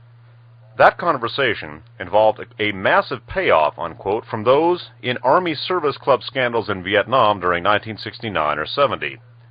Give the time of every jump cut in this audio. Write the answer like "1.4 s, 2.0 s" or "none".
8.0 s